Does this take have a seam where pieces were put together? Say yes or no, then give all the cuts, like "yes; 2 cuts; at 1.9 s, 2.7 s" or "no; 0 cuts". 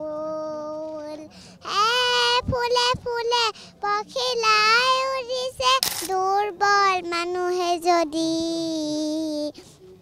yes; 1 cut; at 5.9 s